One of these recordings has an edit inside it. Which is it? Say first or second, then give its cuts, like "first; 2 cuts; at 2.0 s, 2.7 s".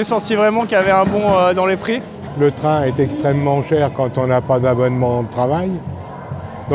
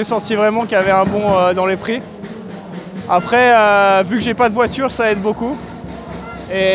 first; 1 cut; at 2.3 s